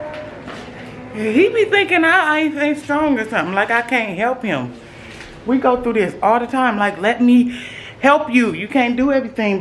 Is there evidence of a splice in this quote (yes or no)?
no